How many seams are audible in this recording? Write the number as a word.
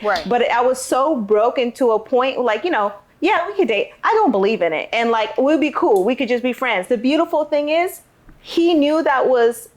one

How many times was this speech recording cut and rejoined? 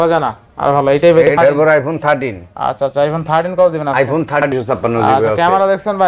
two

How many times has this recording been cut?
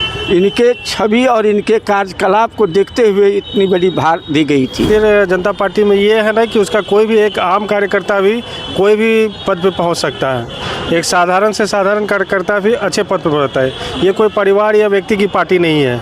one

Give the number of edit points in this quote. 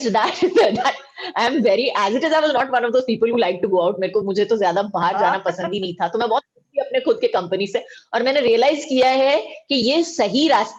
zero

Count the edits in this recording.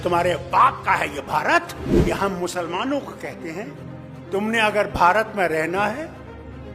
one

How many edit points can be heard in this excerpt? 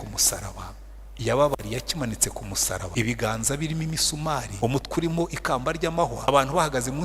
three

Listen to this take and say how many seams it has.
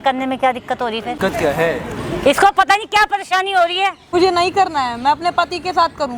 two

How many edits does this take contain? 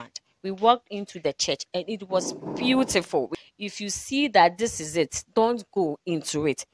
one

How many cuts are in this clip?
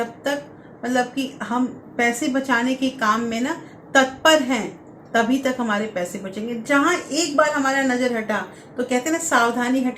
zero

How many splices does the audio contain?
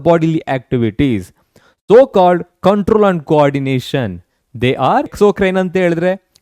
one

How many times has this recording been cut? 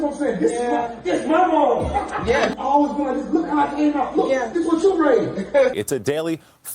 two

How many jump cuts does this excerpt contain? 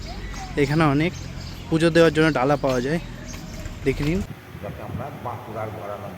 one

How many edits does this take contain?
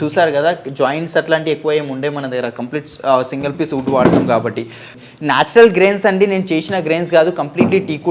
one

